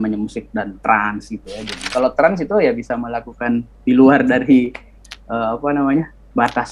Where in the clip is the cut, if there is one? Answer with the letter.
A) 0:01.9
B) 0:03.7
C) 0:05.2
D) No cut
A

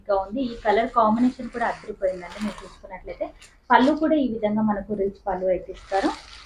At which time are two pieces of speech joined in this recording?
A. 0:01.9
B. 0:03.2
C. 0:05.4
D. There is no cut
D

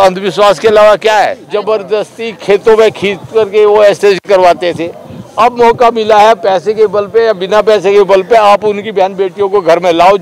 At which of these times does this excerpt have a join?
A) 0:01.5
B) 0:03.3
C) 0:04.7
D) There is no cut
A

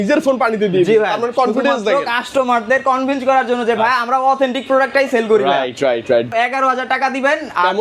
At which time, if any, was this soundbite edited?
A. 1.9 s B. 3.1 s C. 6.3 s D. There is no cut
C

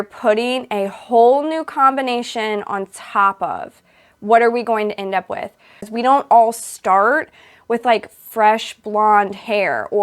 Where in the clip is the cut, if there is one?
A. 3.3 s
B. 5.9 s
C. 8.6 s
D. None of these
B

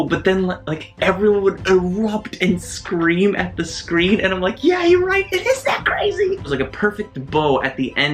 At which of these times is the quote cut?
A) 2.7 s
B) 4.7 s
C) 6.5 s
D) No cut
C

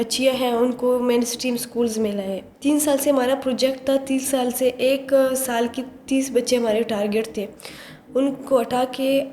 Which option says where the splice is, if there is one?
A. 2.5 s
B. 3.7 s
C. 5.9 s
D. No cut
A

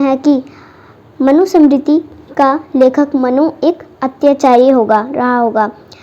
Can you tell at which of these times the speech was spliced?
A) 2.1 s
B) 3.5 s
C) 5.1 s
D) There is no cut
D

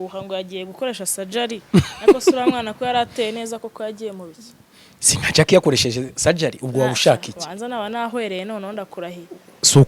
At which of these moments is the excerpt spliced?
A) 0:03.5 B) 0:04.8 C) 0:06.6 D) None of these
D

